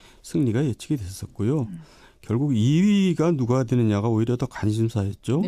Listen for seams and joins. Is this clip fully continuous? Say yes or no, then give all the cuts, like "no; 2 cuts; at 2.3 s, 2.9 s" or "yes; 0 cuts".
yes; 0 cuts